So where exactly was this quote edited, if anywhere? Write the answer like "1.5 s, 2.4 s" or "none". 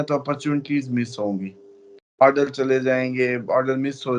none